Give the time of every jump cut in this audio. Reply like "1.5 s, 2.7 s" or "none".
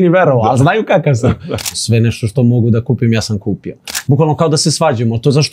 1.7 s, 3.9 s